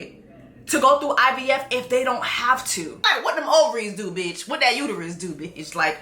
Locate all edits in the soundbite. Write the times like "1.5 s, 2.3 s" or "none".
3.0 s